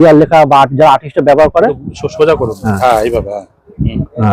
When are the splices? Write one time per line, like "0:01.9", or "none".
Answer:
none